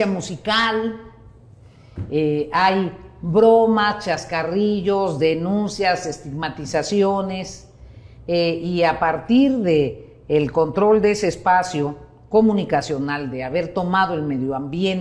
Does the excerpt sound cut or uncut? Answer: uncut